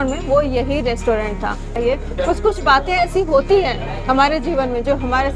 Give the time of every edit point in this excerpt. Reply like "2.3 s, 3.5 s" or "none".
1.8 s